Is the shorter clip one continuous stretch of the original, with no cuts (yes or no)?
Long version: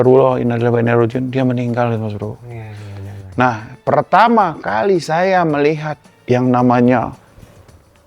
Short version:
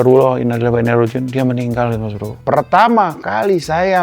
no